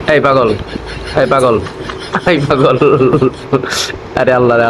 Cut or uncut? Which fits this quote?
uncut